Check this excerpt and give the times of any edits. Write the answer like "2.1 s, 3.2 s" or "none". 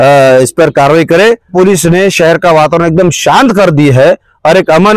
1.5 s